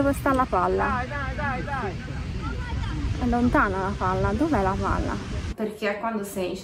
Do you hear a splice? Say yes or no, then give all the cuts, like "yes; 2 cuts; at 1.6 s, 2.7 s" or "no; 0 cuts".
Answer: yes; 1 cut; at 5.4 s